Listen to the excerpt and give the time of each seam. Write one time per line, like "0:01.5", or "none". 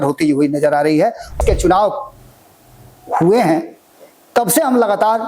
0:01.4